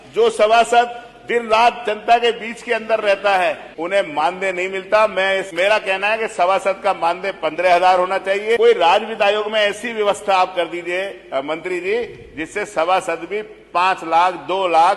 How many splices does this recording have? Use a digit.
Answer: 3